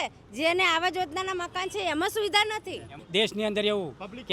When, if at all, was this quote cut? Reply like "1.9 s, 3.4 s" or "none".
2.9 s